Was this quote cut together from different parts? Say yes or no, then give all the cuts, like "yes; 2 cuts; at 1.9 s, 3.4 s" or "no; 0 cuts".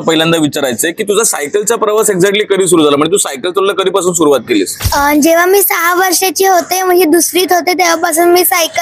no; 0 cuts